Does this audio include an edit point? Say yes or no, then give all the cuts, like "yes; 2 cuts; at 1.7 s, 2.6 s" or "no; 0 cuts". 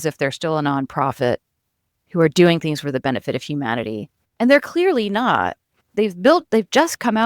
no; 0 cuts